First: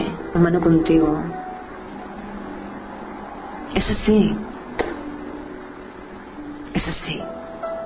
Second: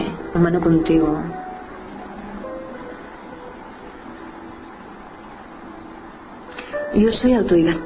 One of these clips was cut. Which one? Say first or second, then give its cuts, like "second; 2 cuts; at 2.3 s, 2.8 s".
first; 1 cut; at 2.4 s